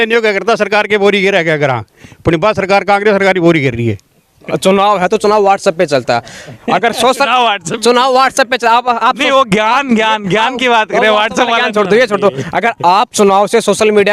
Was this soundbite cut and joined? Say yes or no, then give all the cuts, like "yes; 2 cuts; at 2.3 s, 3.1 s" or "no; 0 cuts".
yes; 1 cut; at 4.5 s